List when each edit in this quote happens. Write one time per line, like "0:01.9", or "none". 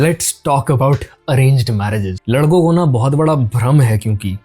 0:02.1